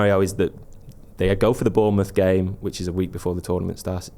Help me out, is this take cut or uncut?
uncut